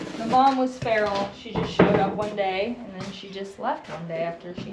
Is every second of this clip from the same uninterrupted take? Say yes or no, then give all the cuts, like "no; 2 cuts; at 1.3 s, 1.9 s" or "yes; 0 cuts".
yes; 0 cuts